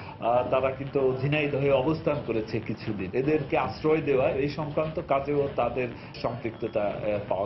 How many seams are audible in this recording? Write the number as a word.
two